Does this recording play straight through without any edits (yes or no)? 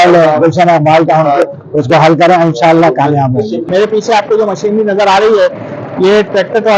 yes